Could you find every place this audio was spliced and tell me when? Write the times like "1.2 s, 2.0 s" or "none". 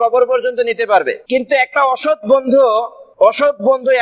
1.2 s, 3.0 s